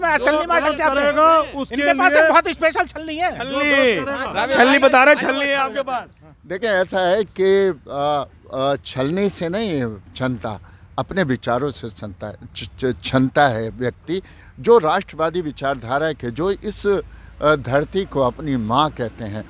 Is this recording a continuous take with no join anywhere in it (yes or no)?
yes